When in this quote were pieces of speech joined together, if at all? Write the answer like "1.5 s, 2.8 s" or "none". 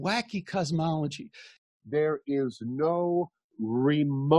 1.6 s